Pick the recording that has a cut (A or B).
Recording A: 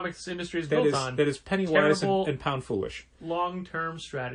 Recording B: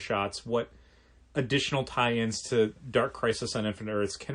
B